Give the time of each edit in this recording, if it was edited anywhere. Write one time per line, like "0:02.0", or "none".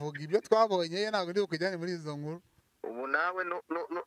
0:02.8